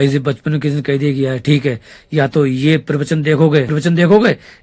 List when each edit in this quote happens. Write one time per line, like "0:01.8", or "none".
0:03.7